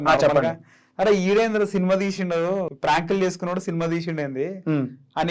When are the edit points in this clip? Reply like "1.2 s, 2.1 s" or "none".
2.7 s